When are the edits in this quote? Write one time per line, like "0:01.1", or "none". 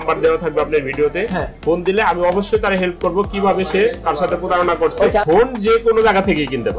0:05.2